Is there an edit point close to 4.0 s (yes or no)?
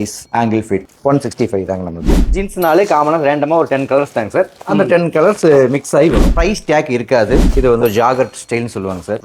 no